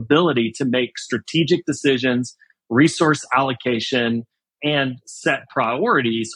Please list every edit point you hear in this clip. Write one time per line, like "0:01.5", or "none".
0:04.5